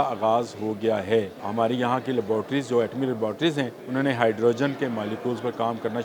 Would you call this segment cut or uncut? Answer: cut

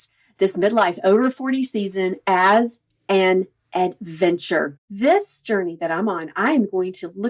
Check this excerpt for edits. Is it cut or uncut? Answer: cut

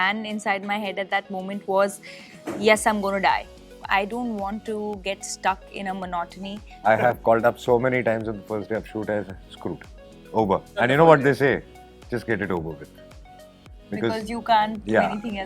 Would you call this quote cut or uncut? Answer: cut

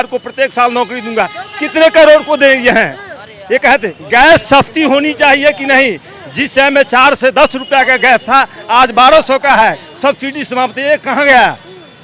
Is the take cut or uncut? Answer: uncut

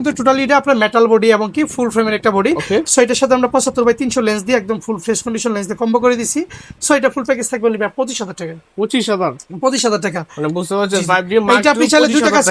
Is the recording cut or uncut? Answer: uncut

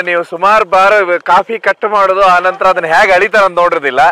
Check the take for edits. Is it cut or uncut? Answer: uncut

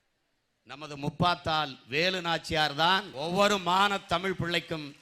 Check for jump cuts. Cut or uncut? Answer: cut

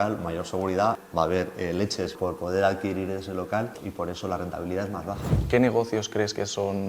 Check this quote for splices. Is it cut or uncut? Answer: cut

